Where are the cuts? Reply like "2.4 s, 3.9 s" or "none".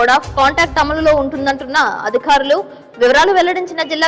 none